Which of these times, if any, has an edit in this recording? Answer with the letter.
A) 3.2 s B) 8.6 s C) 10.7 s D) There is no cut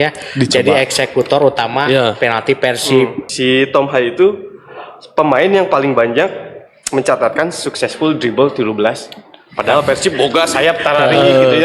A